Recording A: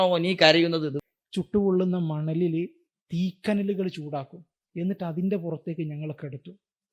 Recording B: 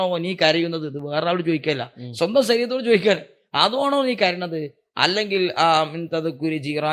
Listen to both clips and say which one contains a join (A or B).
A